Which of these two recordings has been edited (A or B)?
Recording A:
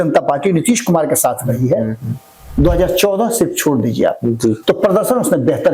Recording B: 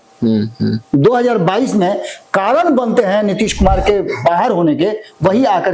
A